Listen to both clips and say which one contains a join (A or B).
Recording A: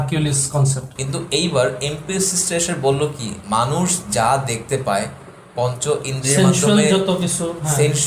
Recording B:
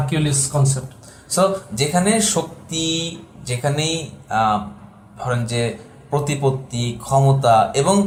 A